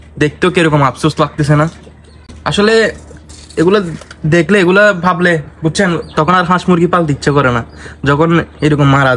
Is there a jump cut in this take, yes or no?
no